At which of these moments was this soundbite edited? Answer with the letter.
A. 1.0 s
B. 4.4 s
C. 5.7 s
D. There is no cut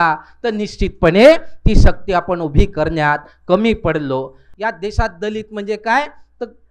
B